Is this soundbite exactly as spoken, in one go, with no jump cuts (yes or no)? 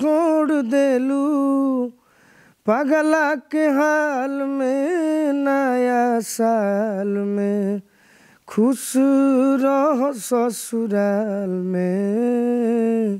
yes